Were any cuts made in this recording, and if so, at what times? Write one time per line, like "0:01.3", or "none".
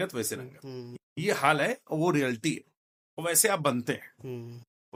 none